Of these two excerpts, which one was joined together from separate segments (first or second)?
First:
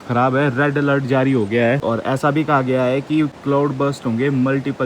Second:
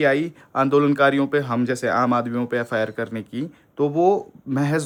first